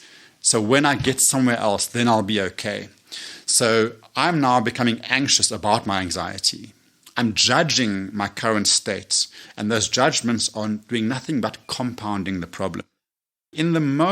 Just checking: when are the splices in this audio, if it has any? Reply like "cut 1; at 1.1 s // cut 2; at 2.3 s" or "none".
cut 1; at 13.1 s